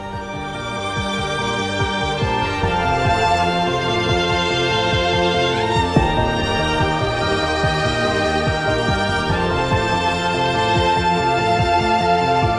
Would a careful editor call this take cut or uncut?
uncut